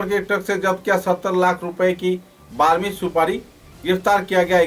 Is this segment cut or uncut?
uncut